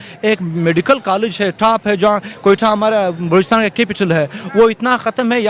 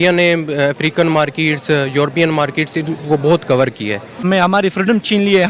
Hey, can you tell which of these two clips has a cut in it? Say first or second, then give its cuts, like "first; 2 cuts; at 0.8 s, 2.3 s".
second; 1 cut; at 4.2 s